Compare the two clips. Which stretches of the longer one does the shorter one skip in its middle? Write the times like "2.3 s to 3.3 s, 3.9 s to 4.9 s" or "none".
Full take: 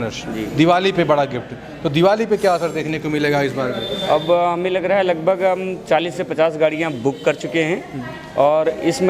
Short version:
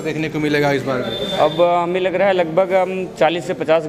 none

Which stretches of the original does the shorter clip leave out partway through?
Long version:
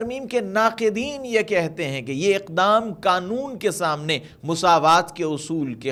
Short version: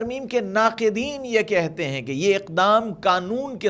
none

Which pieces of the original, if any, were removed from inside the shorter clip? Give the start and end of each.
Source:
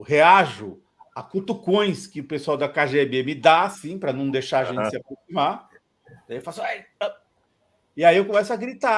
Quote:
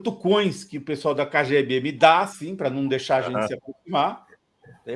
none

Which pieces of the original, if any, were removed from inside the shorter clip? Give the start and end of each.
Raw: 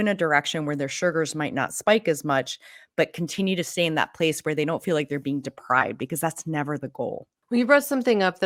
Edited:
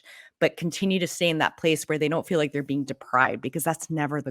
none

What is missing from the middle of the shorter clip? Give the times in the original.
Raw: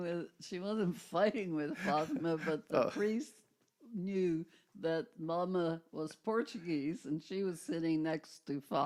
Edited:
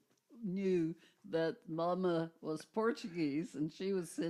none

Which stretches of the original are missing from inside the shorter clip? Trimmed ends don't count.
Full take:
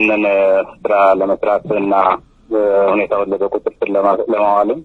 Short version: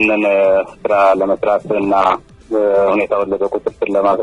none

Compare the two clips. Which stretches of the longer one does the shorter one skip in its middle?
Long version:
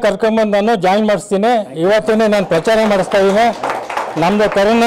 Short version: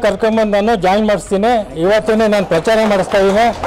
none

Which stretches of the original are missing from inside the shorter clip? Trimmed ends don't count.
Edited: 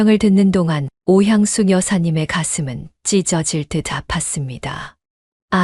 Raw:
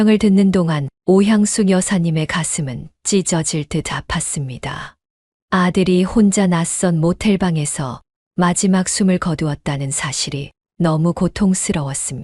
none

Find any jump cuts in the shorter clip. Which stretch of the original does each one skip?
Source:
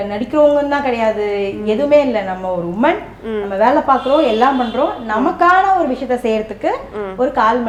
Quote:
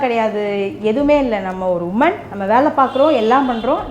3.1 s to 3.4 s

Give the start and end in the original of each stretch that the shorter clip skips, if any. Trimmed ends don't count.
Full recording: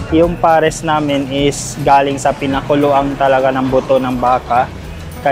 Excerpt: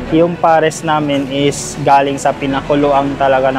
none

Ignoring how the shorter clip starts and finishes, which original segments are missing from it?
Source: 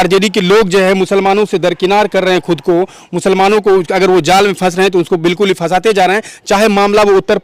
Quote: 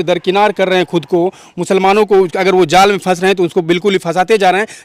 none

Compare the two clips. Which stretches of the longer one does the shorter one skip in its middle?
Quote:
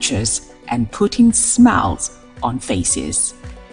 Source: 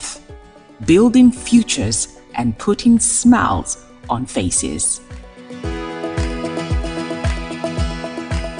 none

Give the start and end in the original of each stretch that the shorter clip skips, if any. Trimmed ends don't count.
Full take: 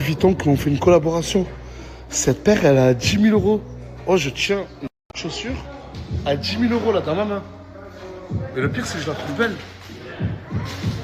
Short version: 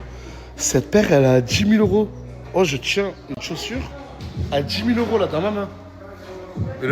4.9 s to 5.2 s

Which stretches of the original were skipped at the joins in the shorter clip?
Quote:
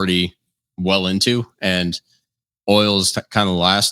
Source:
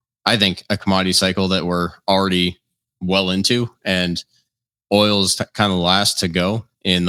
none

